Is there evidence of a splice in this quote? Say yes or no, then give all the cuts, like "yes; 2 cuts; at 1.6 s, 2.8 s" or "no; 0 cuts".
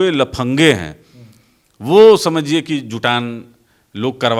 no; 0 cuts